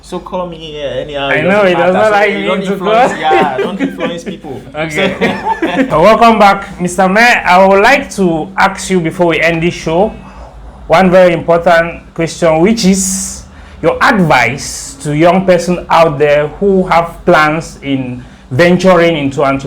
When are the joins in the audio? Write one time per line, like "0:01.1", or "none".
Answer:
0:05.9